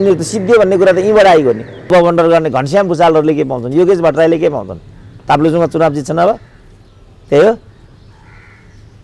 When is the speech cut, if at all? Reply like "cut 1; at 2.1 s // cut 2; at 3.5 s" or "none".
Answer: cut 1; at 1.9 s